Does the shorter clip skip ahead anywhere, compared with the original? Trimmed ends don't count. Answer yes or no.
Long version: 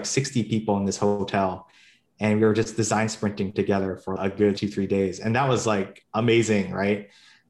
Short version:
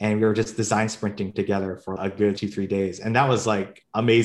no